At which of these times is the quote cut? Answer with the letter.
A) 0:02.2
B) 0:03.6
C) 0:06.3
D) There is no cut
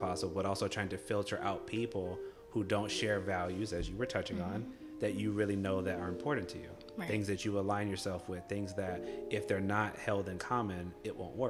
D